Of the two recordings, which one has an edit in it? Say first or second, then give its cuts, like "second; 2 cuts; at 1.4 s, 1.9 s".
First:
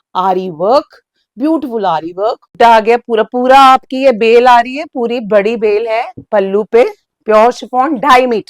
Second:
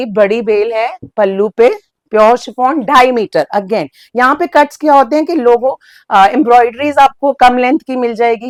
first; 1 cut; at 2.5 s